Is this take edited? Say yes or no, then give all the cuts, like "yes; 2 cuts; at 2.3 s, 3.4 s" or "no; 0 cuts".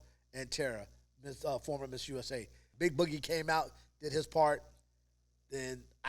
yes; 1 cut; at 2.6 s